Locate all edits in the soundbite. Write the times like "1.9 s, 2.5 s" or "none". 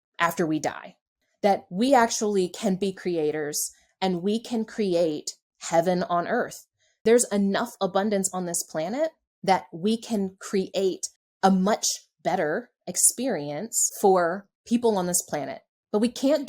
13.8 s, 14.5 s